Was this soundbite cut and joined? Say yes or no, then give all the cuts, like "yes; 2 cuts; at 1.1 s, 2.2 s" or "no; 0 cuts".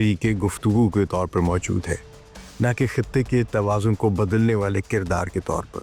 no; 0 cuts